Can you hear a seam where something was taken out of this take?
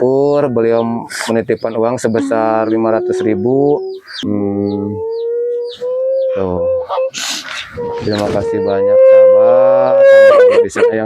yes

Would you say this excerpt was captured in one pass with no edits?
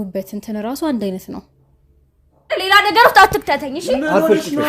no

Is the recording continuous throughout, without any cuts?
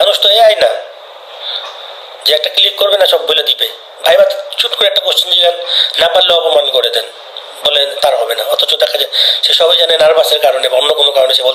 yes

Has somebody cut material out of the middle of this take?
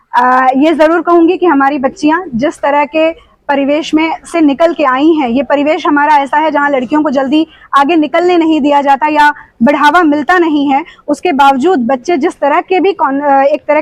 no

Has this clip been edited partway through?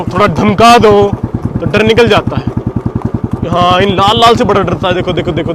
no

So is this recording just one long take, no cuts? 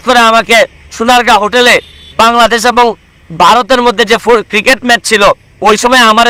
yes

